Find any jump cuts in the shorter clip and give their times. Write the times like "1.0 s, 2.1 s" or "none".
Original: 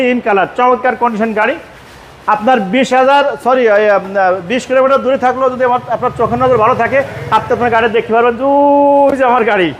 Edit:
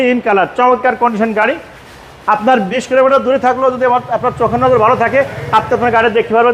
2.7 s